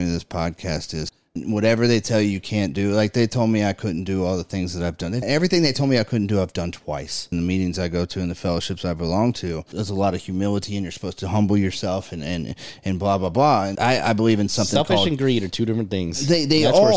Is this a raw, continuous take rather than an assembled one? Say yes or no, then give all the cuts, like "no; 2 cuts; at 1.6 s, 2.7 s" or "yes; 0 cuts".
no; 5 cuts; at 1.4 s, 5.2 s, 7.2 s, 9.7 s, 13.7 s